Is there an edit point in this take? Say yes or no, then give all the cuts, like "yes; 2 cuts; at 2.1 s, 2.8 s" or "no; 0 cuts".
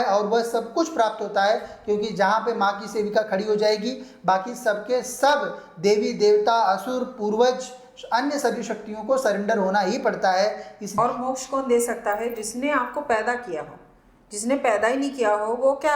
yes; 1 cut; at 10.8 s